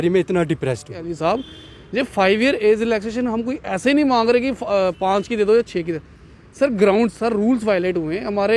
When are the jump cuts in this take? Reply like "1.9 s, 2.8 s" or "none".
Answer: 1.0 s